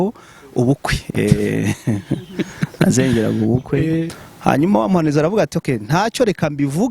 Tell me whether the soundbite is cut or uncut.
cut